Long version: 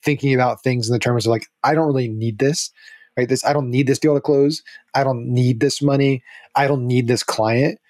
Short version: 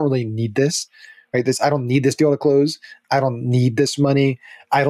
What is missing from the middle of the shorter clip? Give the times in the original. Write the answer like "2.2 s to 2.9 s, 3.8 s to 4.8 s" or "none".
none